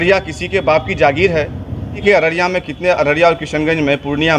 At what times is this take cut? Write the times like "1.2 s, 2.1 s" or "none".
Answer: 2.0 s